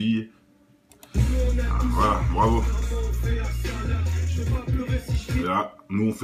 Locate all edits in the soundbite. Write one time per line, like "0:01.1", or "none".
0:01.5